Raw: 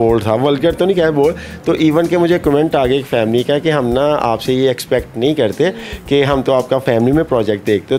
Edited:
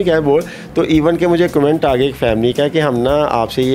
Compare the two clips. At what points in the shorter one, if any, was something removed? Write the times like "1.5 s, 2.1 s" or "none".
none